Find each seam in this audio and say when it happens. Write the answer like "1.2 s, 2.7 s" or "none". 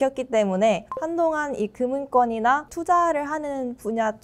0.9 s, 2.7 s